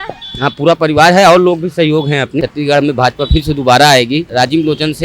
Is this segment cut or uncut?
cut